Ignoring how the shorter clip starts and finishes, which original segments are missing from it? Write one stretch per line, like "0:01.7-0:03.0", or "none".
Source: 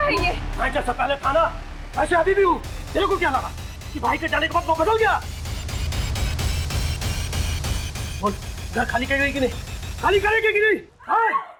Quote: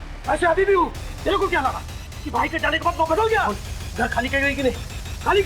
0:05.2-0:08.3